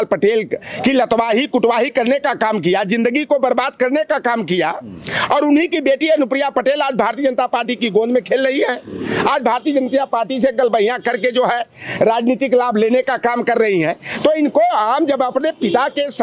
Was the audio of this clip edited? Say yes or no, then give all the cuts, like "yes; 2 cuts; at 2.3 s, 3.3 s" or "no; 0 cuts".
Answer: no; 0 cuts